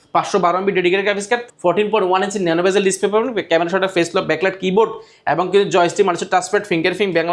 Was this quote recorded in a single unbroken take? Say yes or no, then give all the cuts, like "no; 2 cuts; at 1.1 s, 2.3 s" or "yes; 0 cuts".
no; 1 cut; at 1.5 s